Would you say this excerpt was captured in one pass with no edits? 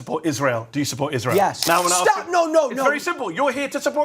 no; 1 cut; at 1.6 s

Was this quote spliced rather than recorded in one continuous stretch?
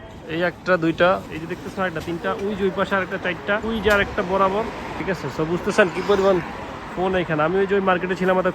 yes; 3 cuts; at 1.2 s, 3.6 s, 4.9 s

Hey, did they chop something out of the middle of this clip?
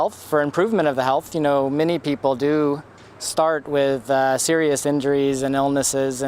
yes; 1 cut; at 3.5 s

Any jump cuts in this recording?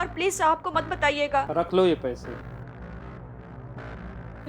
yes; 1 cut; at 1.5 s

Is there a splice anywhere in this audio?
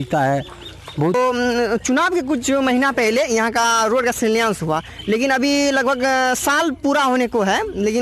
yes; 1 cut; at 1.1 s

